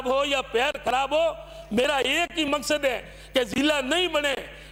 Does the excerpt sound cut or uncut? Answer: uncut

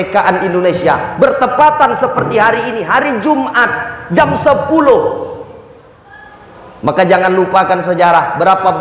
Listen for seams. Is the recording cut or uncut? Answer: uncut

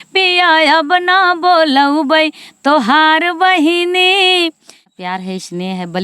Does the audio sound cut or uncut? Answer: cut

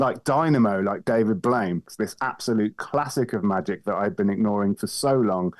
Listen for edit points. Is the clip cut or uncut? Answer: cut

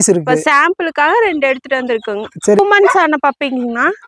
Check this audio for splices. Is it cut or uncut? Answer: cut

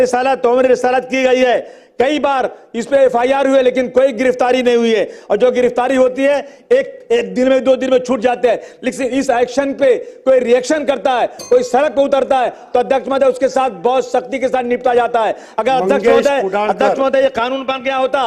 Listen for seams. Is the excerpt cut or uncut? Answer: uncut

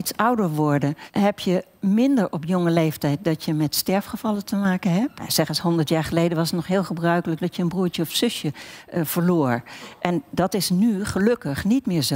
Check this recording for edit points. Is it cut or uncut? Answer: cut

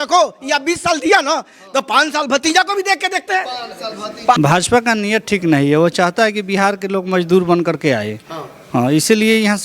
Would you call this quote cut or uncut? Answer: cut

